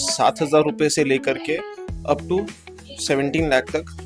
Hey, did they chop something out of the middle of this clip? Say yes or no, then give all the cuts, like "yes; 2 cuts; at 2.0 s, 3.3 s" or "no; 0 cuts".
no; 0 cuts